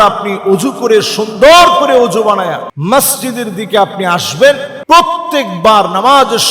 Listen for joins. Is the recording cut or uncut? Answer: cut